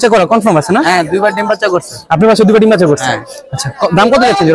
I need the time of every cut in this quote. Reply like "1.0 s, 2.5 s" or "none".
none